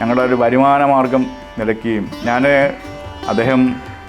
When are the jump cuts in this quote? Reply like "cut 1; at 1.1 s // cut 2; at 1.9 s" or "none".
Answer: cut 1; at 2.9 s